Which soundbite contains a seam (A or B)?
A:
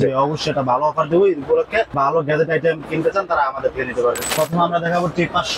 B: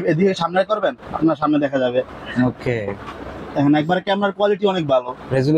A